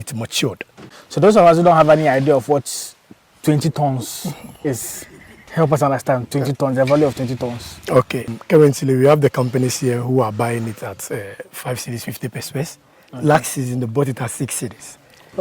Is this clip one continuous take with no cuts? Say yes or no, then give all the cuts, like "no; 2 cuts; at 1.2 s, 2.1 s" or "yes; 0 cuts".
no; 2 cuts; at 0.9 s, 8.3 s